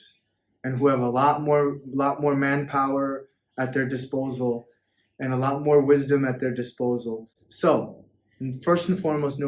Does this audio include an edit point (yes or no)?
no